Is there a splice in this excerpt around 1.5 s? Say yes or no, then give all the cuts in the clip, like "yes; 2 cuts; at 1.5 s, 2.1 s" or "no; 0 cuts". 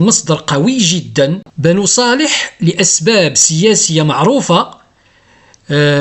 yes; 1 cut; at 1.5 s